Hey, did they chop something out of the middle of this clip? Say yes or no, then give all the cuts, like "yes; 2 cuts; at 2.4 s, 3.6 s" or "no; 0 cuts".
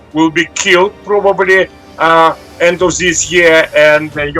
no; 0 cuts